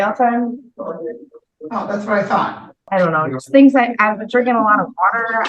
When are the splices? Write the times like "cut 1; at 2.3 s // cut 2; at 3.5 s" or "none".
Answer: cut 1; at 2.8 s